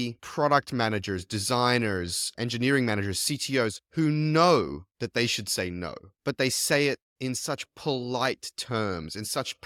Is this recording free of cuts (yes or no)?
yes